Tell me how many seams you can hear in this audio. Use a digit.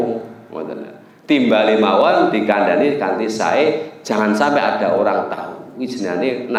0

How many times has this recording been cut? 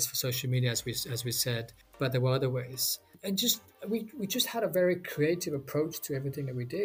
2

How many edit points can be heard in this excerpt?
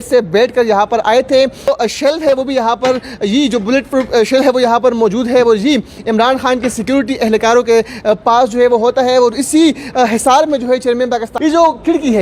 2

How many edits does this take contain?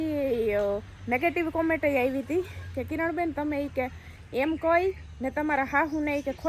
0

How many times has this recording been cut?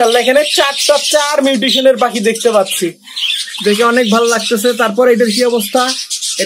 0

